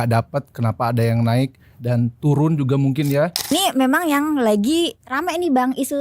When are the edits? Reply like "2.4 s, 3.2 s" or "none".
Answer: 3.5 s